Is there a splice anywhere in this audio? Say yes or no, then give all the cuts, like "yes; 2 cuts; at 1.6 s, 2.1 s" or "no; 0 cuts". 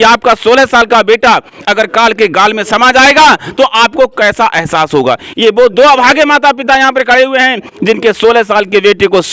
no; 0 cuts